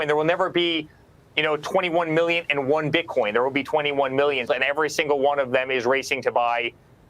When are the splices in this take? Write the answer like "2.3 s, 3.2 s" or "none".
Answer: 4.5 s